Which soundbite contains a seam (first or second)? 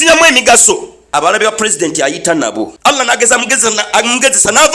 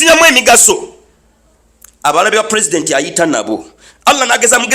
first